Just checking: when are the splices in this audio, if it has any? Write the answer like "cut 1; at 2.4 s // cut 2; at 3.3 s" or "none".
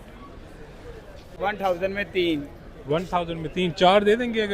cut 1; at 1.2 s